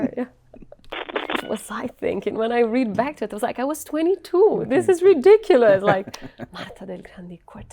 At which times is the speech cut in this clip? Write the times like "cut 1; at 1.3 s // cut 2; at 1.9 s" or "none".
cut 1; at 1.2 s